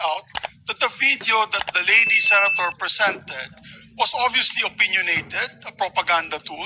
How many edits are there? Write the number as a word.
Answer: zero